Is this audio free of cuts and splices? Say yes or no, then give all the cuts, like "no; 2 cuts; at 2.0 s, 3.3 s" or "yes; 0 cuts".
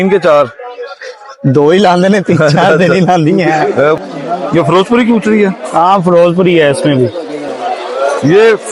no; 2 cuts; at 4.0 s, 7.6 s